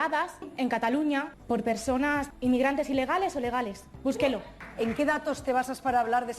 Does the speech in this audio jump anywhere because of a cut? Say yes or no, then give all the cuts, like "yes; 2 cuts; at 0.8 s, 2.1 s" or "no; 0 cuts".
yes; 3 cuts; at 2.3 s, 3.8 s, 4.6 s